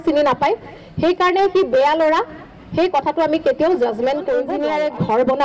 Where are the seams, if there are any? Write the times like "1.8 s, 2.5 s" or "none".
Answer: 4.5 s